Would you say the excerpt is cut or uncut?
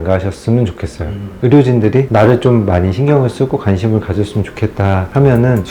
cut